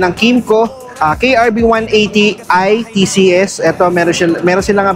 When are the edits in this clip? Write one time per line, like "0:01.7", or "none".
none